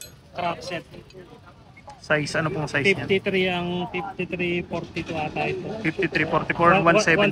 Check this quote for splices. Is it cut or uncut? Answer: uncut